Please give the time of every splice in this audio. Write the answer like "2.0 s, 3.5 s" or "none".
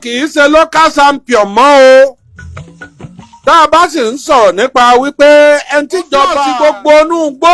6.4 s